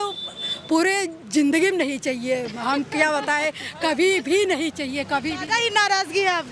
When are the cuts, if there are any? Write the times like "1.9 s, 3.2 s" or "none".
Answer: none